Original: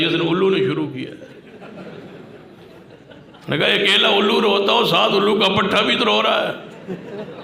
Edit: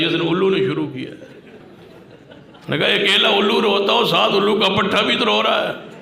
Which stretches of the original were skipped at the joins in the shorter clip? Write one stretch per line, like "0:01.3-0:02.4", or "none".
0:01.6-0:02.4